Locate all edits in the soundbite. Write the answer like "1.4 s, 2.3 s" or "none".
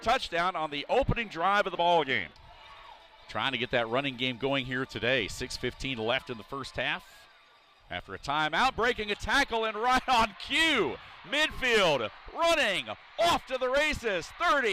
2.5 s